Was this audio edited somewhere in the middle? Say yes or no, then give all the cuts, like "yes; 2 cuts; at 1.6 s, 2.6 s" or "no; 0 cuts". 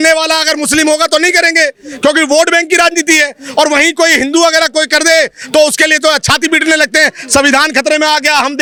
no; 0 cuts